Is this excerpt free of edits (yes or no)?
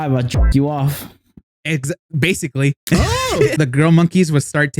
no